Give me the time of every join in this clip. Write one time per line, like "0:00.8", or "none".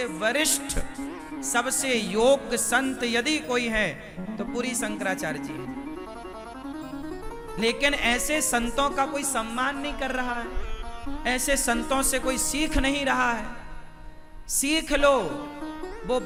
none